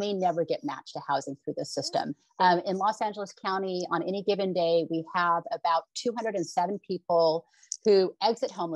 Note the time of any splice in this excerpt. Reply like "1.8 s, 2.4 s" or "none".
2.2 s